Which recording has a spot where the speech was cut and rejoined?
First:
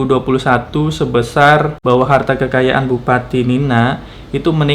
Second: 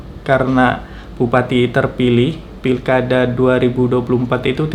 first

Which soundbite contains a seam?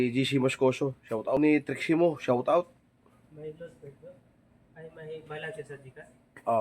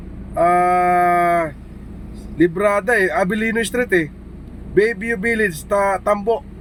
first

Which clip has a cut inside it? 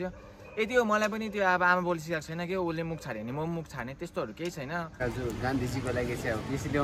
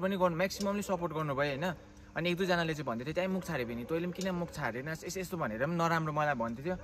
first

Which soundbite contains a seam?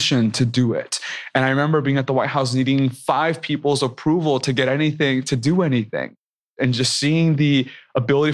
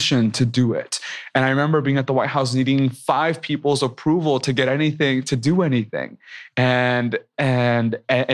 first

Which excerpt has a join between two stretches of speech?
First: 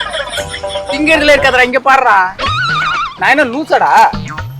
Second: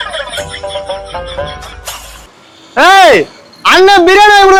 first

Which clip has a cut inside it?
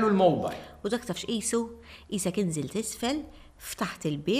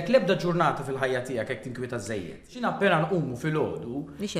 second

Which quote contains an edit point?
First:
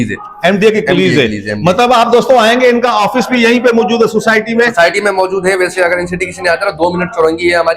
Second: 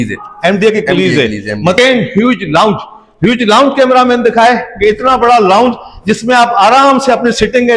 second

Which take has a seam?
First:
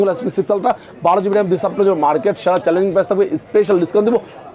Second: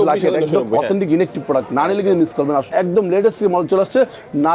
second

